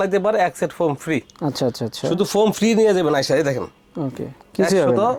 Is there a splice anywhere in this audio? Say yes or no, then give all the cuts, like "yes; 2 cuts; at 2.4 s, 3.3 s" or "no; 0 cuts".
no; 0 cuts